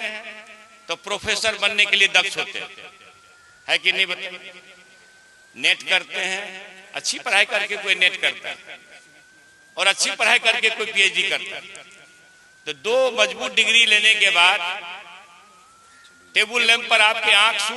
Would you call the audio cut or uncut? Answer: uncut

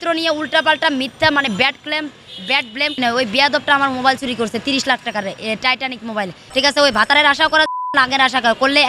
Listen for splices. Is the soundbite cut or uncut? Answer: cut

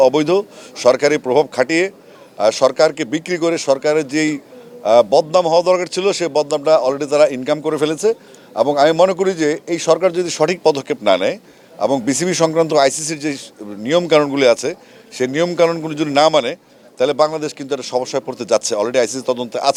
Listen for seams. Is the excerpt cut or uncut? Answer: uncut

